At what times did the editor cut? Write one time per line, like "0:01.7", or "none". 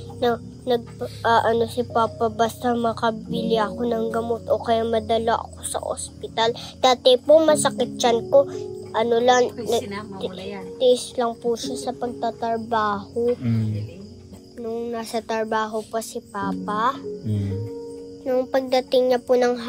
0:14.2